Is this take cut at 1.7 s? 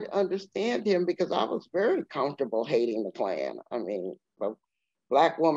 no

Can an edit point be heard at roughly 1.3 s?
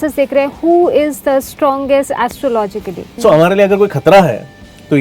no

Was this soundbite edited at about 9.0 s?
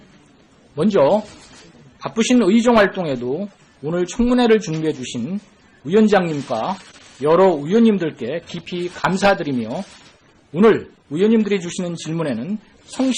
no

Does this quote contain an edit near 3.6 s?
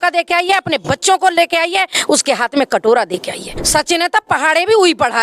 yes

